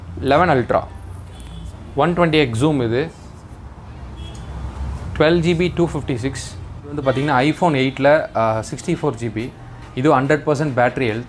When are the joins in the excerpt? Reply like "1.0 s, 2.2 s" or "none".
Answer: 7.0 s